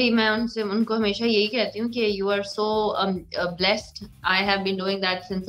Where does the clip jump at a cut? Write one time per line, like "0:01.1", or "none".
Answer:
0:04.1